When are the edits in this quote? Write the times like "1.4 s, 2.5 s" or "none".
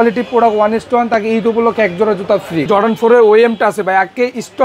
2.7 s